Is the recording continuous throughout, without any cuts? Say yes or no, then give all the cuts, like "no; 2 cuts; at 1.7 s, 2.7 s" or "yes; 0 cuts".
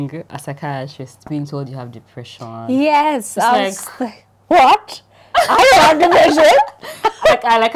yes; 0 cuts